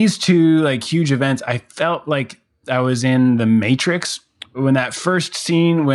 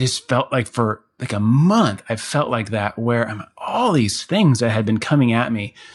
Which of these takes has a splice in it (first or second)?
first